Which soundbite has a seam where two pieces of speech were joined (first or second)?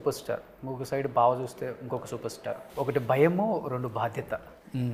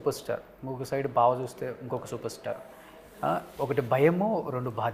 first